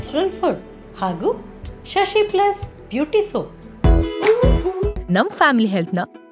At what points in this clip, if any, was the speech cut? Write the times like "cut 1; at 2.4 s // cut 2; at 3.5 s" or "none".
cut 1; at 3.6 s